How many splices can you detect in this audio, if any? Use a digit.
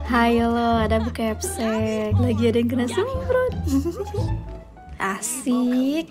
0